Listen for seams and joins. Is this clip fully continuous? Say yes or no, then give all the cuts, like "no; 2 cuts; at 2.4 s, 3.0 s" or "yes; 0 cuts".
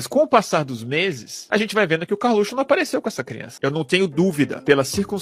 no; 1 cut; at 3.5 s